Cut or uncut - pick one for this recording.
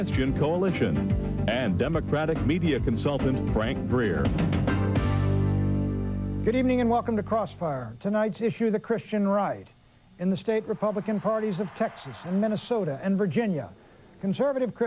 uncut